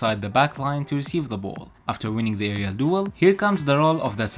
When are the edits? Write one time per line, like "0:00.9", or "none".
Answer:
0:01.7
0:03.1